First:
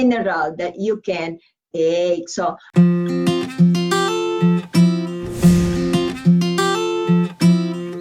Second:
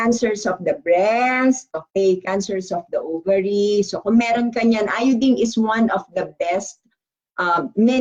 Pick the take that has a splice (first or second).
first